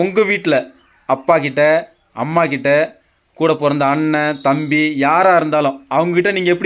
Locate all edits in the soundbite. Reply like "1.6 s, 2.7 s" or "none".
none